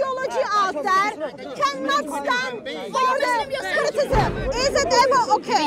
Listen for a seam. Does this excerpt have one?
yes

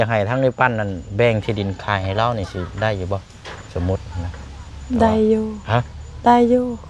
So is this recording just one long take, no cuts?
yes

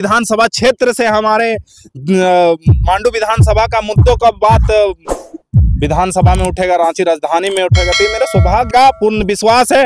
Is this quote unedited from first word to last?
no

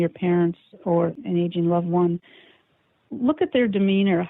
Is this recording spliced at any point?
yes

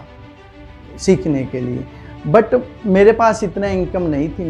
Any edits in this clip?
no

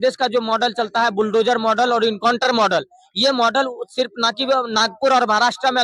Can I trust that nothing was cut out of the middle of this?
yes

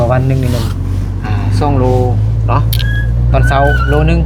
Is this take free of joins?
yes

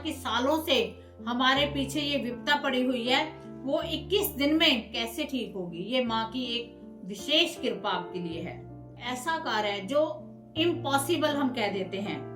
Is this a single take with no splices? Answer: no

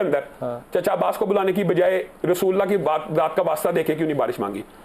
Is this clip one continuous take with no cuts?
yes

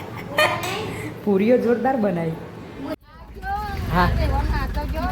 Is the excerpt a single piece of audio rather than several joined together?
no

